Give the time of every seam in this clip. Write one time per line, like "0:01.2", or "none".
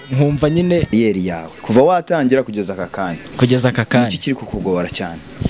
0:00.9